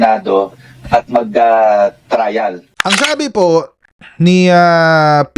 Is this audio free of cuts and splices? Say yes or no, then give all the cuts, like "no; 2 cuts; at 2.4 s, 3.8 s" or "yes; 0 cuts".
no; 1 cut; at 3.0 s